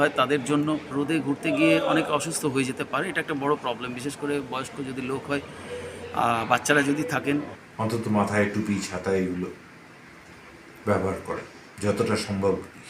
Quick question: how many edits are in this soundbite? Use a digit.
2